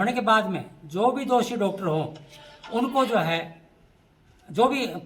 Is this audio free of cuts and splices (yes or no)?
yes